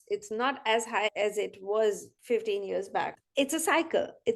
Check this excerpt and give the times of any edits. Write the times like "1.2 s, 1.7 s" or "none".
1.1 s, 2.1 s, 3.2 s